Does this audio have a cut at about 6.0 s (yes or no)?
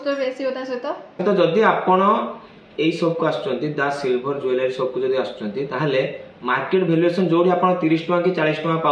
no